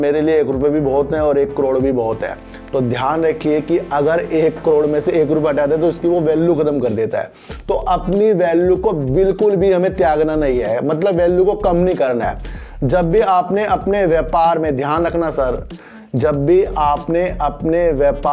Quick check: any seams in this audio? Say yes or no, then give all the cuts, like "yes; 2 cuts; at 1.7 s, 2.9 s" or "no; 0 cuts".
no; 0 cuts